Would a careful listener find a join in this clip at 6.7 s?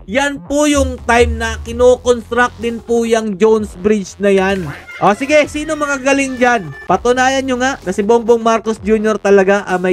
yes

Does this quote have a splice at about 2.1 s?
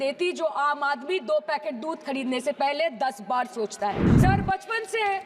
no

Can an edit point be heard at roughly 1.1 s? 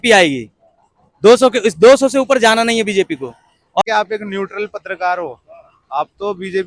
no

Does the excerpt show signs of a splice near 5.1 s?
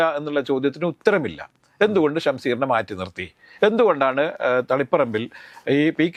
no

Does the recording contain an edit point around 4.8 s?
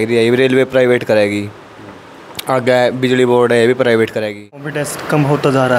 yes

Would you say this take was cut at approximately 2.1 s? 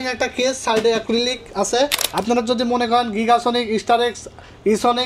yes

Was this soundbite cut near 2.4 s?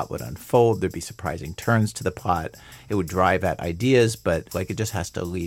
no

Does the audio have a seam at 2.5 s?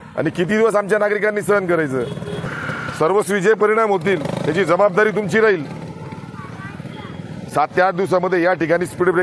yes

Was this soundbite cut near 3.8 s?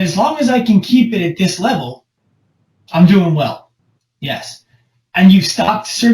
yes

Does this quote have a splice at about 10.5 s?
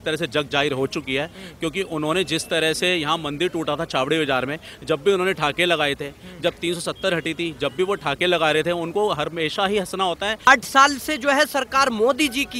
yes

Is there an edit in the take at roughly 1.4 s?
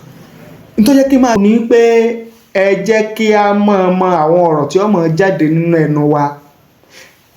yes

